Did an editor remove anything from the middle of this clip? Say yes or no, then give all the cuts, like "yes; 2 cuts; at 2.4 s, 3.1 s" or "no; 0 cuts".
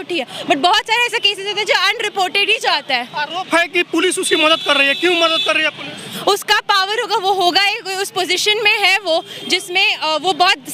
no; 0 cuts